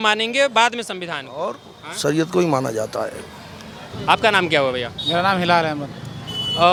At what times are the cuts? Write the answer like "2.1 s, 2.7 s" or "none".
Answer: none